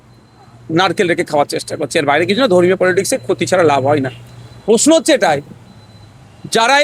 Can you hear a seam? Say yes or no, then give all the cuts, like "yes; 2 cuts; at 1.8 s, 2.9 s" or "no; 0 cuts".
no; 0 cuts